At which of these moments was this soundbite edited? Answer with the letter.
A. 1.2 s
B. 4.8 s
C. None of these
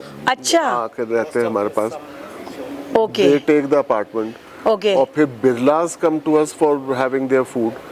C